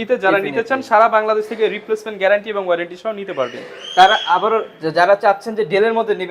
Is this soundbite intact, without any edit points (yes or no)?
yes